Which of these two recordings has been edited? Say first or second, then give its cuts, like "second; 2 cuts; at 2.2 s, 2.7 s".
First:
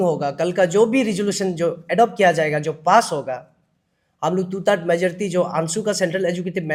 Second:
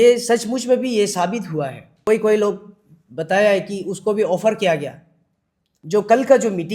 second; 2 cuts; at 2.1 s, 5.7 s